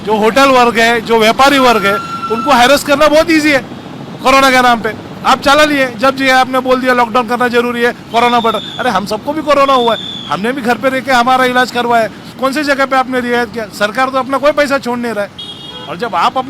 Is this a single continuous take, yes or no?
no